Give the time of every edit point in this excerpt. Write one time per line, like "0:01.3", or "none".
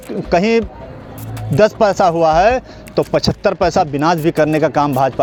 none